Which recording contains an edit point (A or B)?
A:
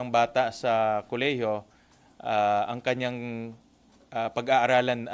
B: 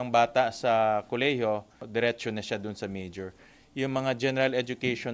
B